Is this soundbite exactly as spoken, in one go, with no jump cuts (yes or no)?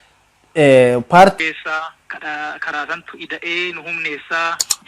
no